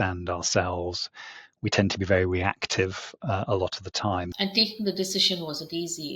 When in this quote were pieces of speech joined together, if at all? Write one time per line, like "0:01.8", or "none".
0:04.3